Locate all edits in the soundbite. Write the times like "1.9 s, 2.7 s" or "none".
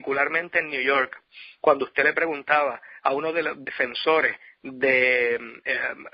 none